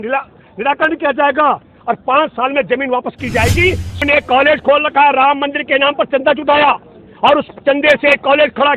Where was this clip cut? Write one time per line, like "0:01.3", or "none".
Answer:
0:04.0